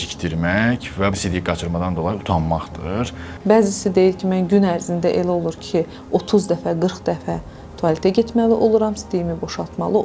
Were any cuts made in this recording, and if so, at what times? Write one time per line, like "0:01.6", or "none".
0:01.1
0:03.1